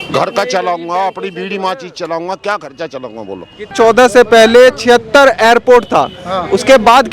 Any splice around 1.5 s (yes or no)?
no